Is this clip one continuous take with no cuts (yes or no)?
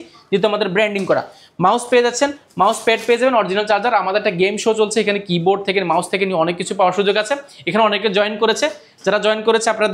yes